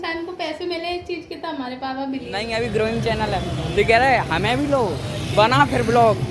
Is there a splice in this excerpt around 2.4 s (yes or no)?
yes